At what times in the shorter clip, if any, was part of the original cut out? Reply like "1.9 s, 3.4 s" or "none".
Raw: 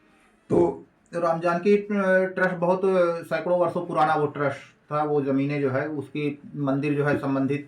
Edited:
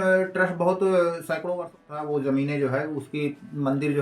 1.5 s